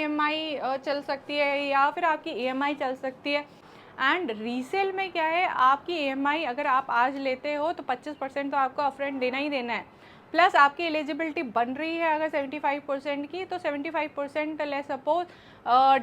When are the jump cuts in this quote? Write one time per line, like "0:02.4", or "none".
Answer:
0:03.7